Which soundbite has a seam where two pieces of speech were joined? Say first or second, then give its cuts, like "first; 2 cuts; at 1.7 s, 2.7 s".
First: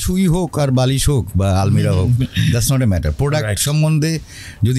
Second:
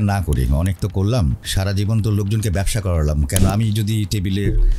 second; 1 cut; at 1.4 s